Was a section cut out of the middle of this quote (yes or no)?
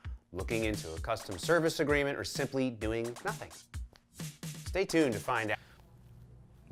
no